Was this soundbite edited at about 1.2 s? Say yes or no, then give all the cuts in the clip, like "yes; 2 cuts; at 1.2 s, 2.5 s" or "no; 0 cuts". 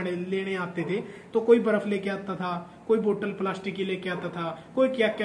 no; 0 cuts